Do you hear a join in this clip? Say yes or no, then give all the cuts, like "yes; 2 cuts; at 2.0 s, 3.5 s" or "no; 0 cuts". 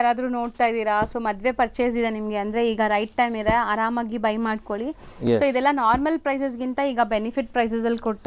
no; 0 cuts